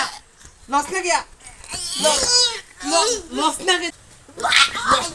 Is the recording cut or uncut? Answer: cut